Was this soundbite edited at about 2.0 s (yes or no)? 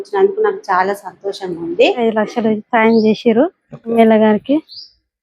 yes